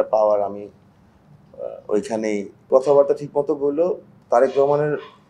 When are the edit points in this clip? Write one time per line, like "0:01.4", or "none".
0:02.7